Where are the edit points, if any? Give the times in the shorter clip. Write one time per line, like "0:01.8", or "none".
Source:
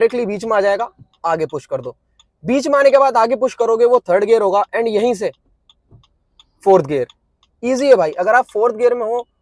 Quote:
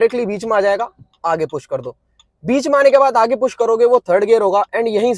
none